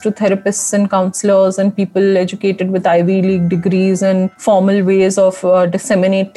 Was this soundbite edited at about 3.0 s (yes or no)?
no